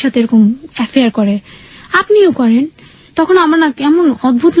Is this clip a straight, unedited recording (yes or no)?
yes